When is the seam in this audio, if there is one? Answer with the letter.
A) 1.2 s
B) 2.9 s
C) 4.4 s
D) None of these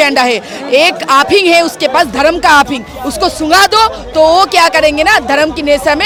D